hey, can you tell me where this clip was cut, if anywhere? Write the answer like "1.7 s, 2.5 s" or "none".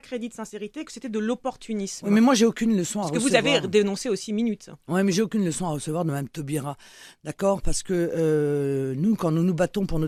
none